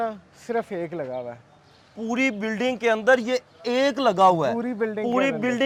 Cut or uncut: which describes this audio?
uncut